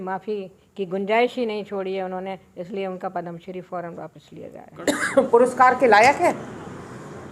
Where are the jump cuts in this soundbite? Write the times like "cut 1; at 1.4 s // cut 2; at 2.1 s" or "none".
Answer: cut 1; at 4.7 s